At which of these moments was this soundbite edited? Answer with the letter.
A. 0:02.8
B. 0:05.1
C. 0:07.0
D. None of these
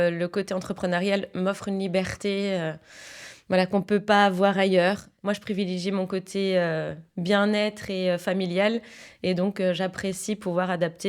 B